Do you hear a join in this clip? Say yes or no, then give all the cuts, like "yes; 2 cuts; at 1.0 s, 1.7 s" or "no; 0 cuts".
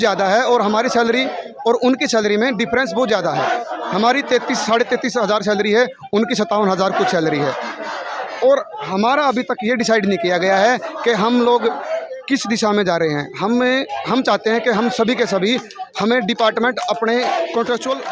no; 0 cuts